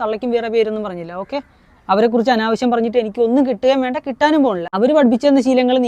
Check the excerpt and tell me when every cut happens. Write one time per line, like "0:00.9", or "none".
0:04.7